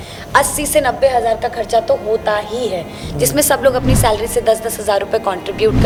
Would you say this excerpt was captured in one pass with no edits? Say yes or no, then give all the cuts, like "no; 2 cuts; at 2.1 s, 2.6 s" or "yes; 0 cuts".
yes; 0 cuts